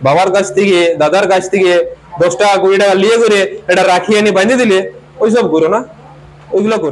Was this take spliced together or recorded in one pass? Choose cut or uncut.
uncut